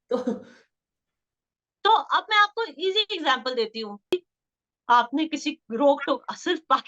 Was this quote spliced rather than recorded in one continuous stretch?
yes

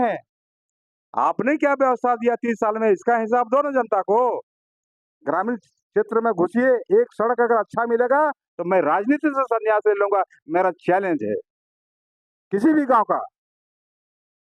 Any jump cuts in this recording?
no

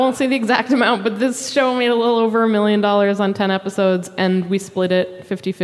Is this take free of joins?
yes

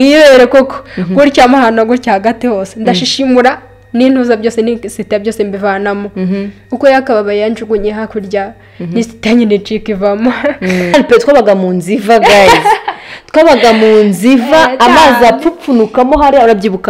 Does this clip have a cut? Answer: yes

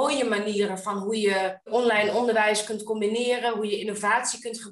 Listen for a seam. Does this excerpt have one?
yes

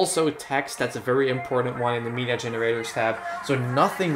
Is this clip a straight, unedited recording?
yes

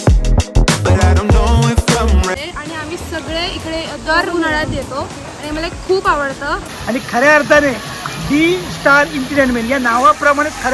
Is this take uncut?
no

